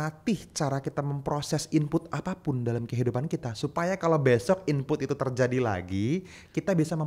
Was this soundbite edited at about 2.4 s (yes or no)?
no